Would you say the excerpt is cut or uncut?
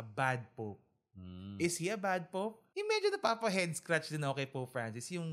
cut